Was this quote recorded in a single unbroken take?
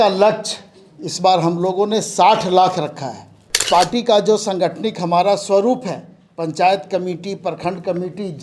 no; 1 cut; at 3.6 s

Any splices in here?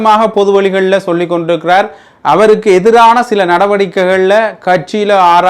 no; 0 cuts

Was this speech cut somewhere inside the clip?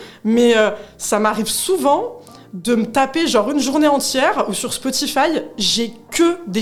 no; 0 cuts

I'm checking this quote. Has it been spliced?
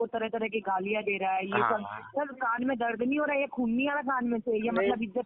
no; 0 cuts

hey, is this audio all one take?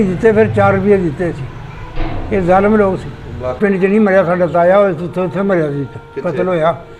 no; 1 cut; at 3.6 s

